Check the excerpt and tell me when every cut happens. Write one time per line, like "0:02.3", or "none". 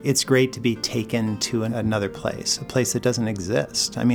0:01.7